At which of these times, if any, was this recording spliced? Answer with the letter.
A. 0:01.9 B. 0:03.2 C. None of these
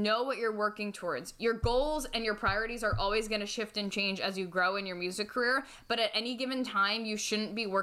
C